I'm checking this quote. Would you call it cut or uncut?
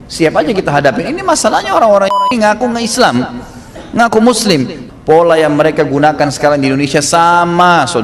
cut